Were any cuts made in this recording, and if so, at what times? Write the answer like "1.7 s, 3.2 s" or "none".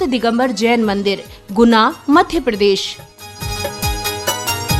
none